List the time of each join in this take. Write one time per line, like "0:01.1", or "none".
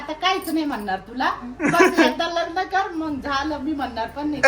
none